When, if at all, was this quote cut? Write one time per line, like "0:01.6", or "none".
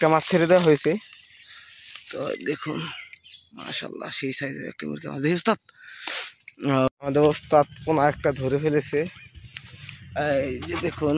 0:06.9